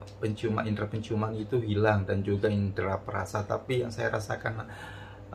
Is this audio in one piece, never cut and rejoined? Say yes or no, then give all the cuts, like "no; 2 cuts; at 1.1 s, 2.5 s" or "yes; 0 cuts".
yes; 0 cuts